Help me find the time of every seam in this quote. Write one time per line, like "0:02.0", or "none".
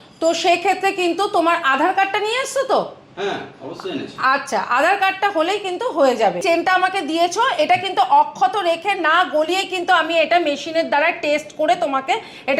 0:06.4